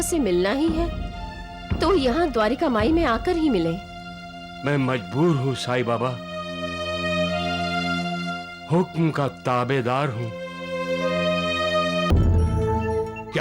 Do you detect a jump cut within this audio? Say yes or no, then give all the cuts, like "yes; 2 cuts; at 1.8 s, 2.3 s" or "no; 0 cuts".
yes; 1 cut; at 12.1 s